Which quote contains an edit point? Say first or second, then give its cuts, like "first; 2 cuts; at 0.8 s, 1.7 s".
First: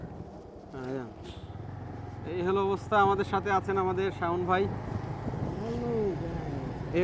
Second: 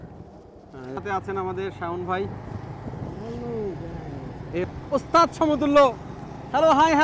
second; 2 cuts; at 1.0 s, 4.6 s